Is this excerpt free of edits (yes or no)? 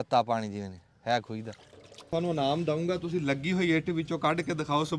no